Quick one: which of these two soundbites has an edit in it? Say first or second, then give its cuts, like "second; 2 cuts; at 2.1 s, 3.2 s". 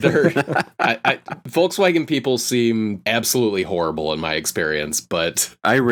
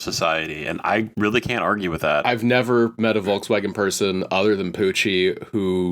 second; 2 cuts; at 1.1 s, 2.2 s